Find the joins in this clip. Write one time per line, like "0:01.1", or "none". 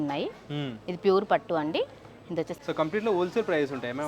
0:02.5